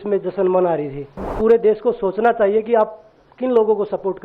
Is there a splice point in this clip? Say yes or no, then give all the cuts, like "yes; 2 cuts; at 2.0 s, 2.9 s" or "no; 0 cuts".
yes; 1 cut; at 1.3 s